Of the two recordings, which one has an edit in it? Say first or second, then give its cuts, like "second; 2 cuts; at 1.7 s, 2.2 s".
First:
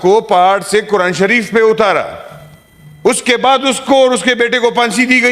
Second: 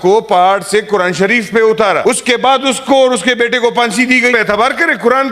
second; 2 cuts; at 2.0 s, 4.3 s